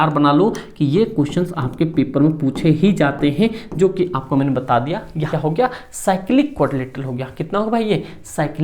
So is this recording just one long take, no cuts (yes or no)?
no